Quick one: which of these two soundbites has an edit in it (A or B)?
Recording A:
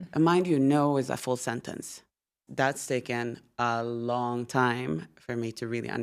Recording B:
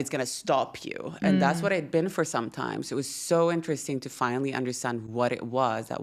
A